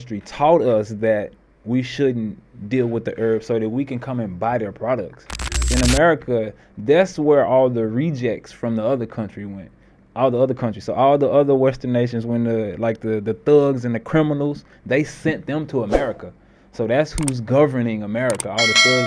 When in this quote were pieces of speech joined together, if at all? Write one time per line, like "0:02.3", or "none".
0:05.7